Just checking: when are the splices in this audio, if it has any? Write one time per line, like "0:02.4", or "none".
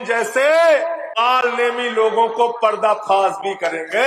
0:01.1

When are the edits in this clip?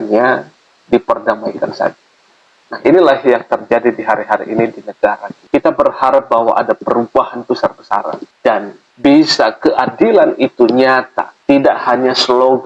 none

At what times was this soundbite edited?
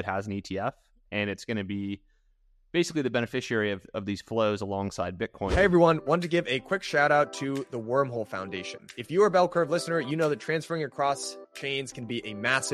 0:05.5

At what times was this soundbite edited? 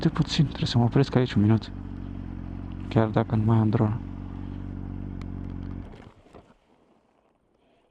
none

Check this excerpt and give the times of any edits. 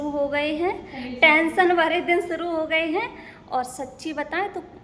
none

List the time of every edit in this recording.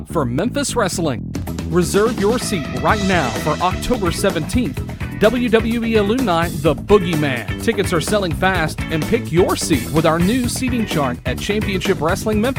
none

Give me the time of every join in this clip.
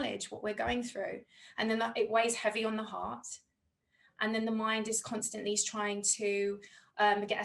none

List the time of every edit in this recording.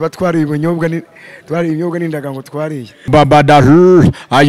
0:03.0

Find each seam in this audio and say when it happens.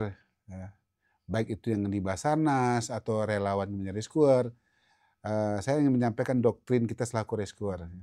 none

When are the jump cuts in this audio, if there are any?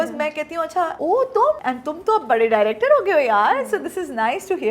0:00.9
0:01.6

